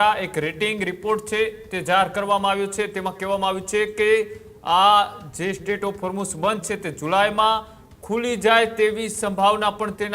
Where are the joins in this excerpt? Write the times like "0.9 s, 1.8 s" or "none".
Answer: none